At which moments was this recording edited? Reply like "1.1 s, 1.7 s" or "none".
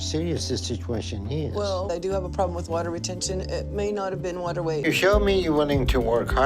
4.8 s